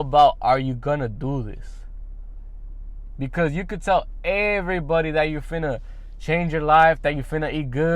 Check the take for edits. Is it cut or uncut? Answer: uncut